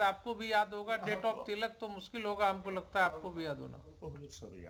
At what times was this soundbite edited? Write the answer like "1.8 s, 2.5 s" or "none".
none